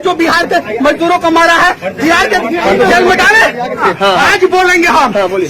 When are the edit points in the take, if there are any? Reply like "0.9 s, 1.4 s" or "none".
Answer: 3.8 s